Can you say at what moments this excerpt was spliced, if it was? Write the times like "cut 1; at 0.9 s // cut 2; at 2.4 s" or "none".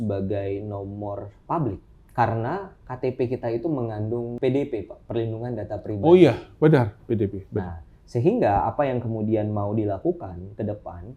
cut 1; at 1.9 s // cut 2; at 4.3 s